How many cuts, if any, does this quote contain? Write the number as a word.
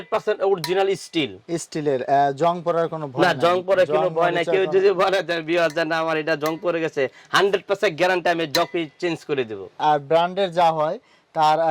one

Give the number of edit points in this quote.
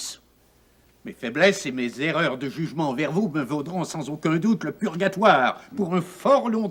zero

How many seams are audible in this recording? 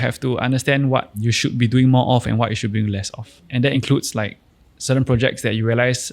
one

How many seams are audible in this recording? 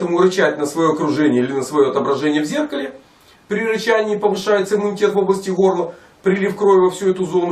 one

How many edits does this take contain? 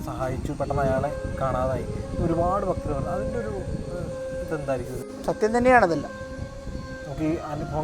one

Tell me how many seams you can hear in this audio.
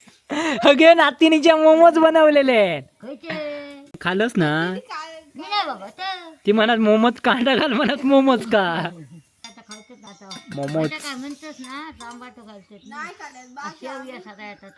one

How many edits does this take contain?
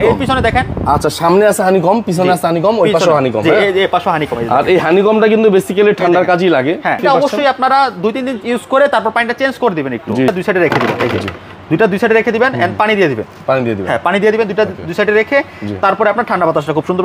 two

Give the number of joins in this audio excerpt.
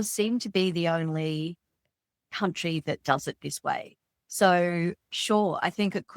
one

